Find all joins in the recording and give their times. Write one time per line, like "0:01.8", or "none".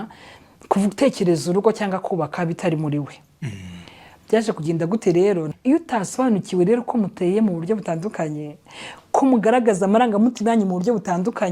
0:05.5